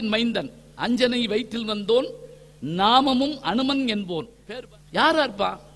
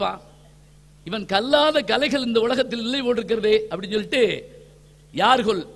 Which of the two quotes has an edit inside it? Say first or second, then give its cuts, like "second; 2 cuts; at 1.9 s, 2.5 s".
first; 1 cut; at 4.3 s